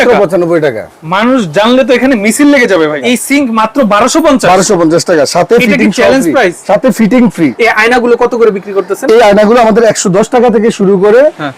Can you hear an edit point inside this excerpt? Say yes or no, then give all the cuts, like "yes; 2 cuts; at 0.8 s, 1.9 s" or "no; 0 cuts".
yes; 2 cuts; at 3.0 s, 7.5 s